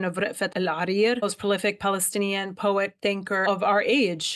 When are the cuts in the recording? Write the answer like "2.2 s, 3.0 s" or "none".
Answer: 1.2 s, 3.4 s